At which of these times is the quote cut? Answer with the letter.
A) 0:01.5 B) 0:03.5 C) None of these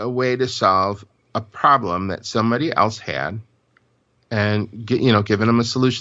C